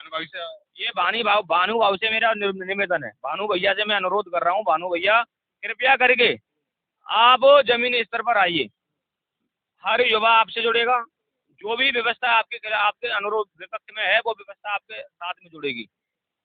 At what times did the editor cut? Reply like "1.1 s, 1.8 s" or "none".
none